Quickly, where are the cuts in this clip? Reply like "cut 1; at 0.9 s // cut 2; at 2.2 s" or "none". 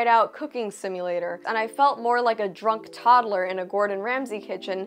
cut 1; at 1.4 s

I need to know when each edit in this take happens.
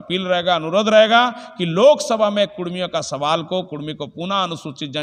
none

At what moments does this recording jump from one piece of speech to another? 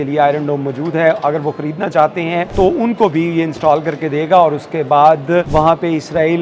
cut 1; at 2.5 s // cut 2; at 5.5 s

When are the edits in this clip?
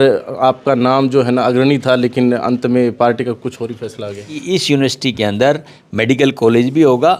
cut 1; at 4.3 s

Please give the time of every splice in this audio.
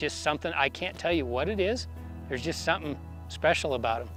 none

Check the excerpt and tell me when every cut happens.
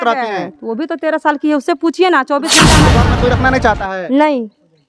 cut 1; at 2.9 s

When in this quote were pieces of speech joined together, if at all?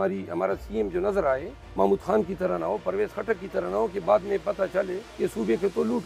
cut 1; at 1.6 s // cut 2; at 5.0 s

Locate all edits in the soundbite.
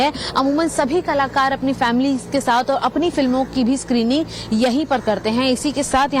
cut 1; at 2.5 s

